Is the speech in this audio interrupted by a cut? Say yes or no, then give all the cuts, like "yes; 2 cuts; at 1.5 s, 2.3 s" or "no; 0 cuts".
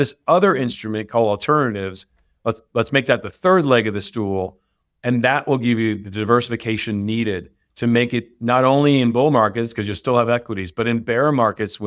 no; 0 cuts